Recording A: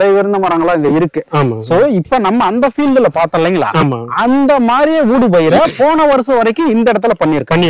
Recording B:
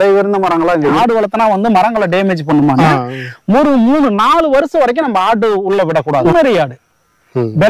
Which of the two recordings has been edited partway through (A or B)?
B